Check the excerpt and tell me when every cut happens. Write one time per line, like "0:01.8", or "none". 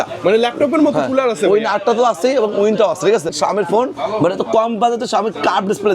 0:03.3